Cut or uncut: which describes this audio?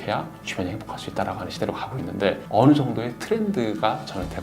cut